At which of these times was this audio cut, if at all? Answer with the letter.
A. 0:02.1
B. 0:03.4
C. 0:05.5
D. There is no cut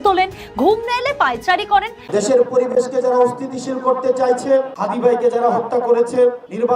A